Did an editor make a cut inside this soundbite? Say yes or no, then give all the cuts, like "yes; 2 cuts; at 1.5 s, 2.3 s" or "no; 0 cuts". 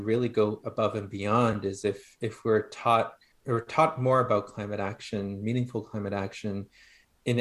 no; 0 cuts